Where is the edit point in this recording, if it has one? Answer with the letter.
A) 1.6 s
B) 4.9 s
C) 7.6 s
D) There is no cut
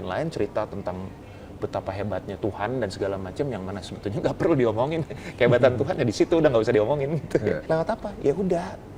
C